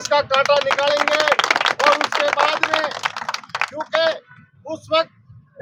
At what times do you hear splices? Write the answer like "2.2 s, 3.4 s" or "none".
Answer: none